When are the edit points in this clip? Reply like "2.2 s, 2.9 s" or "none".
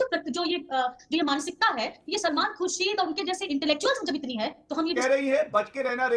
5.0 s